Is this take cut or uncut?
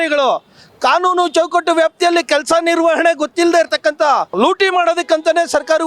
cut